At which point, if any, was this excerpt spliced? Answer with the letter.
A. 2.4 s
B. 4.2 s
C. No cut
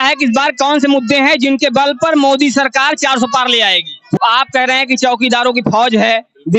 B